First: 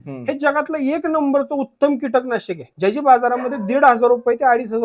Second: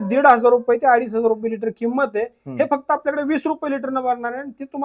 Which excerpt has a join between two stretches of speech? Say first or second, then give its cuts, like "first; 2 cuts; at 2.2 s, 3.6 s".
first; 1 cut; at 2.6 s